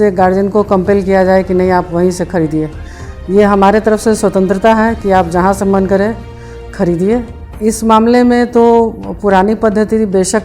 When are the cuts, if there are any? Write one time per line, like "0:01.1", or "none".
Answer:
0:07.4